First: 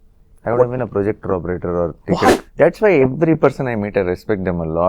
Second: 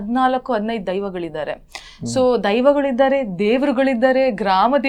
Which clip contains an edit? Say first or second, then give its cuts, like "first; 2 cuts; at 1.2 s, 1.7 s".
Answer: first; 1 cut; at 2.3 s